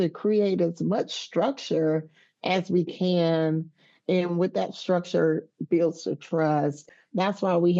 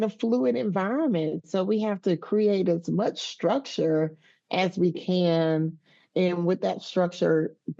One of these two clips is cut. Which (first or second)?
first